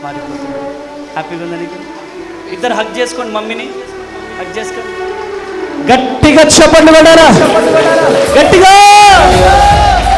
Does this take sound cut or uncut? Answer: uncut